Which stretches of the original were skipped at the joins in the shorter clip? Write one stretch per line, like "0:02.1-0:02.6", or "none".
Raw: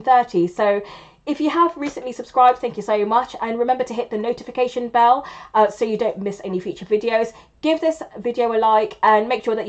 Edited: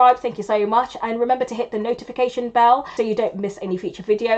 0:05.3-0:05.7